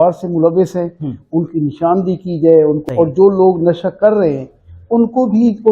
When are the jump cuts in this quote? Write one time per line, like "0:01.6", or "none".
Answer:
0:02.8